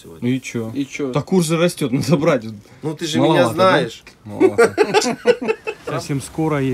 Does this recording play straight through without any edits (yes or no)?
no